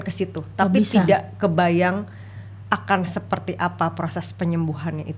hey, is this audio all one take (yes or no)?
yes